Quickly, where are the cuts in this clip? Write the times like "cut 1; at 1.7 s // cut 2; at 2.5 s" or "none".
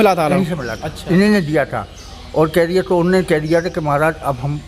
none